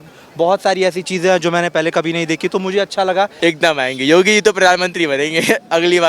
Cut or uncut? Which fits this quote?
cut